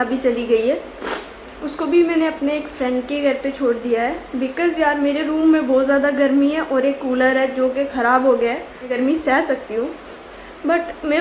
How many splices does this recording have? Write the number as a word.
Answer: one